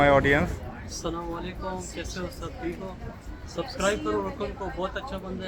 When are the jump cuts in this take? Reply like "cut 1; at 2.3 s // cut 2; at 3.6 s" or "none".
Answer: none